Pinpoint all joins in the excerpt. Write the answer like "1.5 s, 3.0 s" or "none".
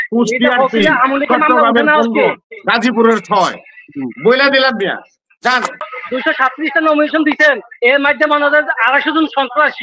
5.9 s